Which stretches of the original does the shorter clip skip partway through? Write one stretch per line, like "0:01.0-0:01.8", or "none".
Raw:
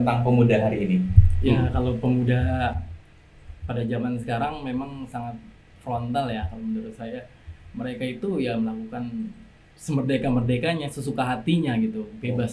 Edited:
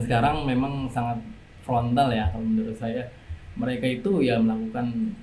none